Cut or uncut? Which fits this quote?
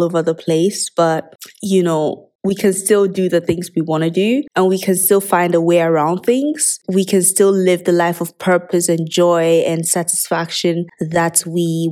uncut